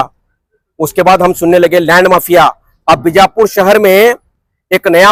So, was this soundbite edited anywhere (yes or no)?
no